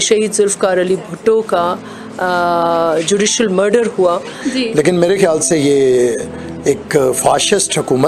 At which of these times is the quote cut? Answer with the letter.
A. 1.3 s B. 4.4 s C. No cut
B